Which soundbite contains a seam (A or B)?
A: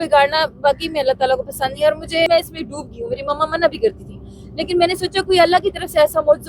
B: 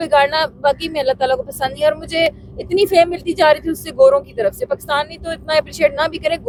A